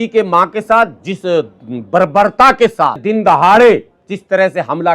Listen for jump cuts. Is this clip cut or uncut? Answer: cut